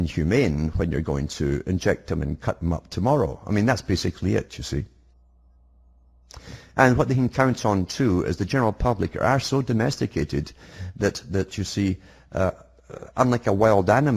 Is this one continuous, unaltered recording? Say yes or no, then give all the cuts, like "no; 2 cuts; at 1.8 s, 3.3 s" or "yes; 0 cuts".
no; 1 cut; at 3.4 s